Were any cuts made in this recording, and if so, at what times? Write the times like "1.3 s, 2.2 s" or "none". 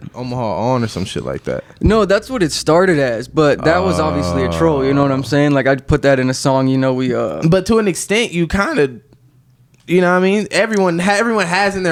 none